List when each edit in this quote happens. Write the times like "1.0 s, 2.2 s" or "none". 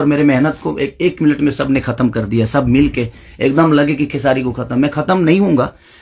none